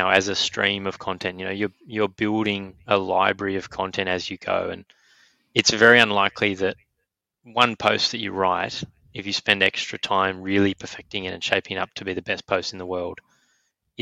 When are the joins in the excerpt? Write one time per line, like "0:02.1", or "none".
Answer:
none